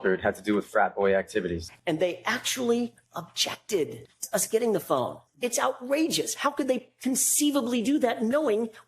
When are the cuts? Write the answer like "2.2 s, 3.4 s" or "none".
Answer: 1.6 s, 4.1 s, 5.2 s